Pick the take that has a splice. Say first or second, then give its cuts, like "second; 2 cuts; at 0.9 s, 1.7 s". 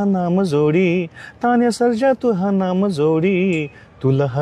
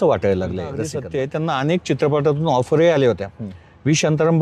second; 1 cut; at 0.9 s